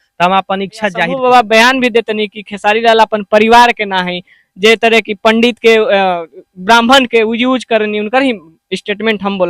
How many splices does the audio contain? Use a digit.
1